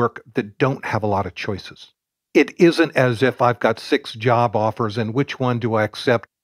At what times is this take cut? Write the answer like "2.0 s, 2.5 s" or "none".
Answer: 2.2 s